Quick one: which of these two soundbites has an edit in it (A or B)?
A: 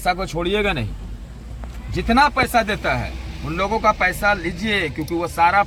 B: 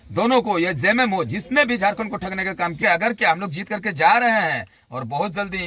B